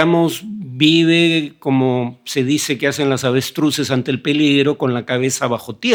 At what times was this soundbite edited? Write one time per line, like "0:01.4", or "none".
none